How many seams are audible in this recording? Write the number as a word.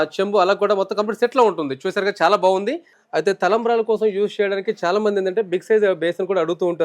one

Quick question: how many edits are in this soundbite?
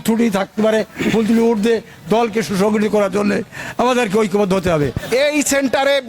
one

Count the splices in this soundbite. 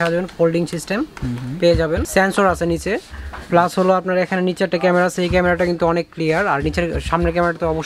one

